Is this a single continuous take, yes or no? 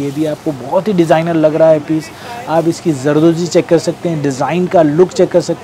yes